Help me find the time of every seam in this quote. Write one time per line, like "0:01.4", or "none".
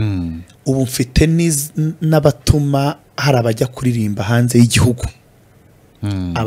none